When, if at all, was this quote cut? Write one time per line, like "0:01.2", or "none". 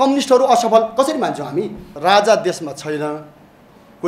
0:02.0